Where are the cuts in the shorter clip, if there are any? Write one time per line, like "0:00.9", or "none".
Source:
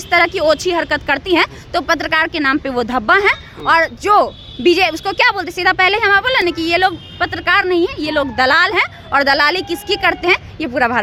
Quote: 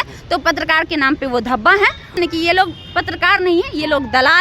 0:02.1